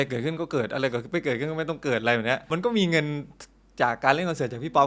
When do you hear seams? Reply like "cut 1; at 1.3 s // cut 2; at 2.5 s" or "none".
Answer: cut 1; at 2.4 s